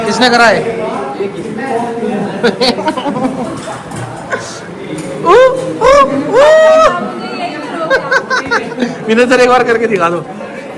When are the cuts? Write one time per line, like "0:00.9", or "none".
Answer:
none